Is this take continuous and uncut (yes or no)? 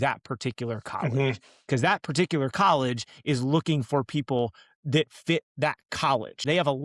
yes